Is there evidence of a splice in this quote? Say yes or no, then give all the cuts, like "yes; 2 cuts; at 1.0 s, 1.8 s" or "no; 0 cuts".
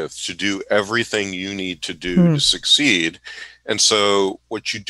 no; 0 cuts